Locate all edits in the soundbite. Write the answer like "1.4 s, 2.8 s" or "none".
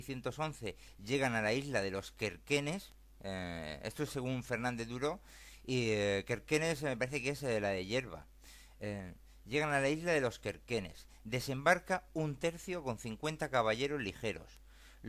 11.6 s